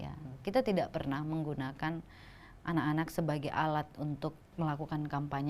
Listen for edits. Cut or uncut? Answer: cut